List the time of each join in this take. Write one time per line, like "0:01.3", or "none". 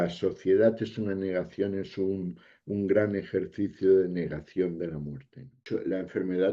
0:05.5